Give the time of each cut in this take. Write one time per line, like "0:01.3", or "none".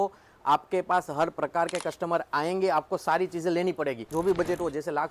0:04.1